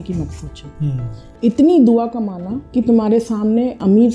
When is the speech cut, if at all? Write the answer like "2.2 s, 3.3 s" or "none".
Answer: none